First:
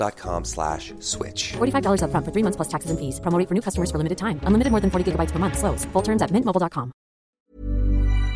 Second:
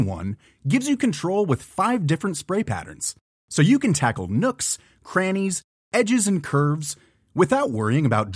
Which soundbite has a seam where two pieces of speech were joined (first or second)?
first